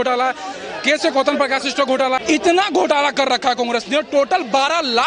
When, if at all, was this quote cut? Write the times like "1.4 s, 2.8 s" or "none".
2.2 s